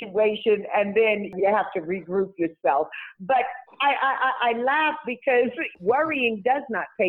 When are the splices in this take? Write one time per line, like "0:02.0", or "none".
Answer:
0:01.3
0:05.7